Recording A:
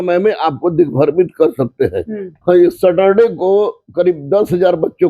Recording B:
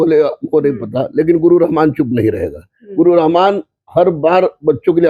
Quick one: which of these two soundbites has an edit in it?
A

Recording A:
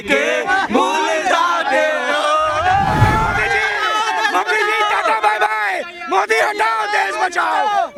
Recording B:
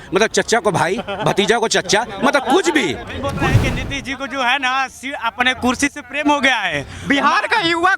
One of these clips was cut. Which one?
B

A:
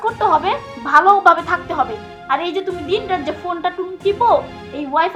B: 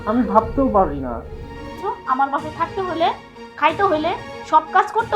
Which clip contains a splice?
B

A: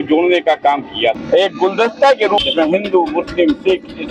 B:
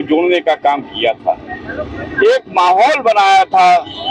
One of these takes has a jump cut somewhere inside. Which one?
A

